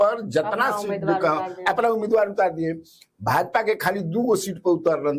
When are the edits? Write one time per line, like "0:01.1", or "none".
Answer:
none